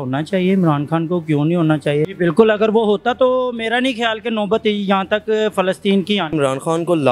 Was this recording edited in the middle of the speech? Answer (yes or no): yes